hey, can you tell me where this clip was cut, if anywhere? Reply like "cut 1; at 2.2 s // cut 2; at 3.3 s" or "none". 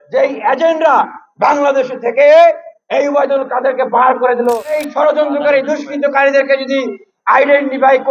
cut 1; at 4.7 s

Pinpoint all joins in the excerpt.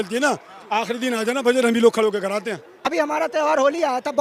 cut 1; at 2.8 s

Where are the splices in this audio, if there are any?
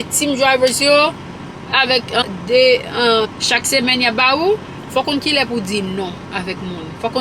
cut 1; at 2.2 s // cut 2; at 3.3 s // cut 3; at 4.8 s

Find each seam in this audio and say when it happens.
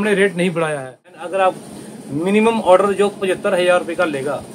cut 1; at 1.1 s

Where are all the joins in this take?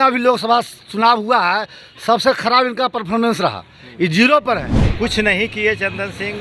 cut 1; at 4.8 s

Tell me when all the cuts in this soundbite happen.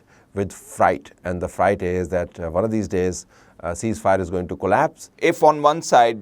cut 1; at 5.1 s

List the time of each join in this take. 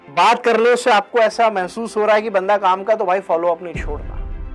none

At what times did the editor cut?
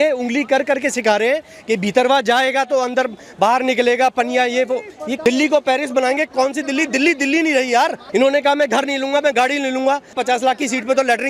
cut 1; at 5.2 s // cut 2; at 8.0 s // cut 3; at 10.2 s

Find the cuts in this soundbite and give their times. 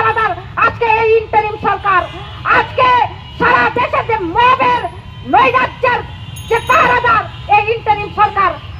none

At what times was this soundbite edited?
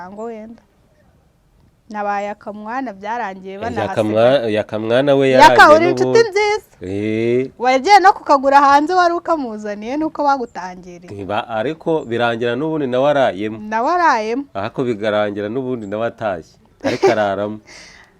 none

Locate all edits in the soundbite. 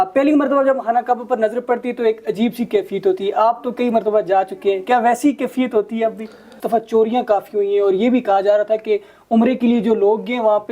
cut 1; at 6.5 s

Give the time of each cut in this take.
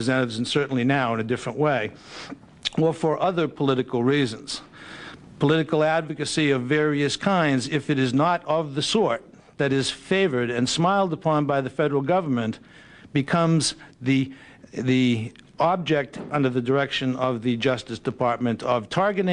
none

